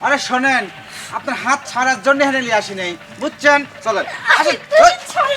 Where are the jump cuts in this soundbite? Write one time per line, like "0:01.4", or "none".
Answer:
none